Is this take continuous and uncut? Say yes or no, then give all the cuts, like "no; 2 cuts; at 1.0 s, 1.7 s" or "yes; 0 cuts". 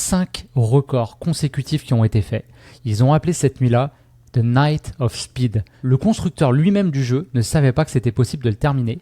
no; 1 cut; at 5.7 s